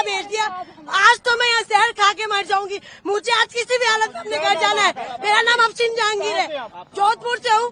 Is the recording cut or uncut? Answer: uncut